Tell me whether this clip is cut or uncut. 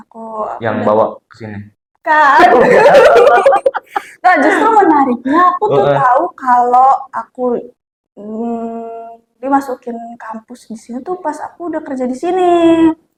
uncut